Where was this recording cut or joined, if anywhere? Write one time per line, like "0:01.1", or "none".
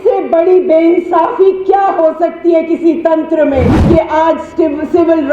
0:03.7